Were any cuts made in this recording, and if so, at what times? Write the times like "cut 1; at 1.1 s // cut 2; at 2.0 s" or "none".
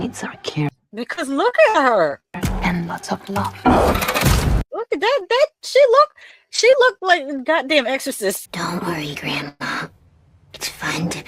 cut 1; at 8.4 s // cut 2; at 9.6 s